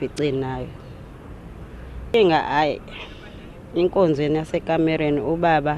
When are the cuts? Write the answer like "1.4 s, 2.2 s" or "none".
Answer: 2.1 s